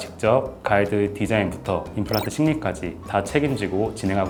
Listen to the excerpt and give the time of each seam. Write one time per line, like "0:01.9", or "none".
none